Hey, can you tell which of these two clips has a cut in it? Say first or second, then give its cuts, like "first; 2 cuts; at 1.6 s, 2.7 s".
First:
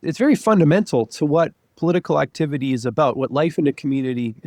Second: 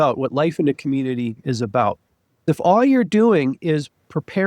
second; 1 cut; at 2.5 s